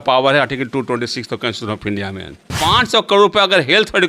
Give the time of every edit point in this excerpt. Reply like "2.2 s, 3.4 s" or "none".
2.6 s